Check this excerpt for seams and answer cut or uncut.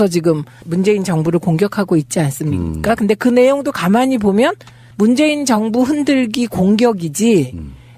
cut